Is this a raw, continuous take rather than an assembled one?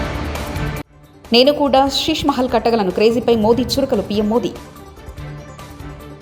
yes; 0 cuts

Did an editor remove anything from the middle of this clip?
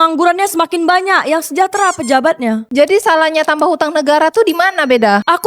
yes; 1 cut; at 2.7 s

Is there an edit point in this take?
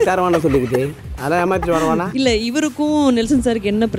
yes; 1 cut; at 2.1 s

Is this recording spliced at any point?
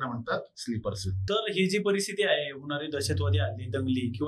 yes; 1 cut; at 1.1 s

